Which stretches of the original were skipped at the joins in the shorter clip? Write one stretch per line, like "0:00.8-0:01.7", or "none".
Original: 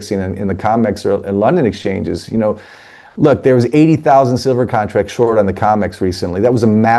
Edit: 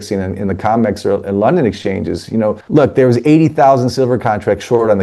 0:02.6-0:03.1